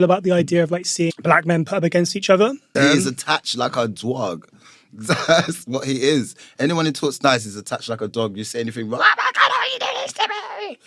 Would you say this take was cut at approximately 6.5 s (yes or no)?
no